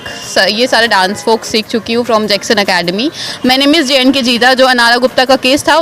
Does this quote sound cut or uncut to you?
cut